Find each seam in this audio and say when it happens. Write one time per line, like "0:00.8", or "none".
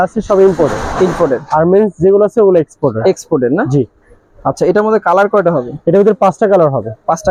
none